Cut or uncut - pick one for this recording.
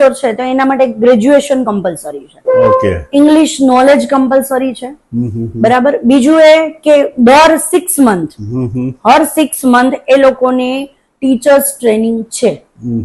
uncut